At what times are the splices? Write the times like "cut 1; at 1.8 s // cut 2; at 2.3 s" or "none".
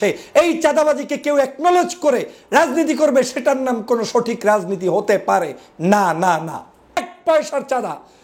cut 1; at 7.1 s